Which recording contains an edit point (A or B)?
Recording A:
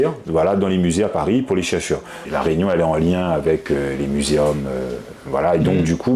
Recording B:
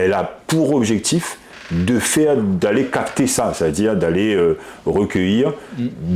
A